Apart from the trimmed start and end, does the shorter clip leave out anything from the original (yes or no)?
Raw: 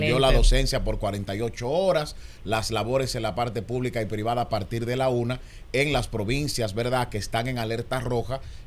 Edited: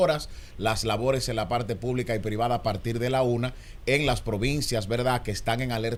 no